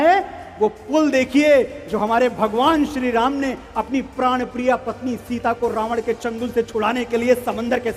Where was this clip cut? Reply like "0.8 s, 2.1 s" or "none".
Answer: none